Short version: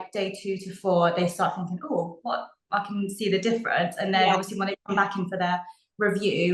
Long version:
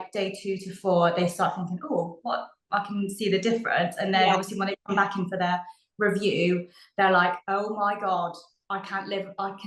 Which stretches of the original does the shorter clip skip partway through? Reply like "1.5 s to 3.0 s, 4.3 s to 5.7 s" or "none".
none